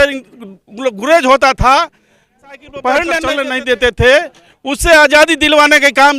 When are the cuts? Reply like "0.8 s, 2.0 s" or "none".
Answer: 3.3 s

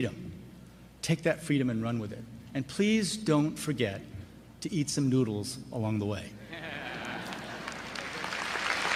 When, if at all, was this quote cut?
none

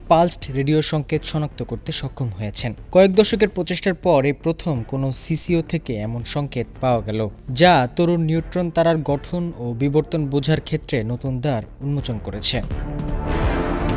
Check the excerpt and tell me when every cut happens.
none

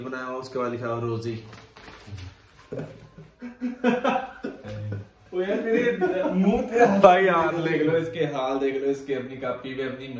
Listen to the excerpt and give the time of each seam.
none

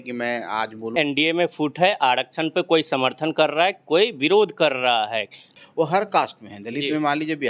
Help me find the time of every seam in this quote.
0.9 s, 5.4 s

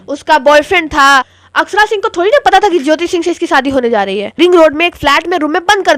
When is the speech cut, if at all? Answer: 1.4 s, 4.4 s

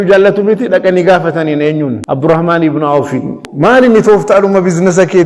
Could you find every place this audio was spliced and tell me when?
2.0 s, 3.5 s

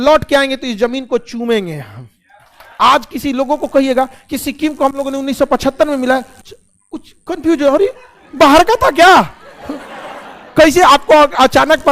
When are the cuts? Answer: 2.6 s

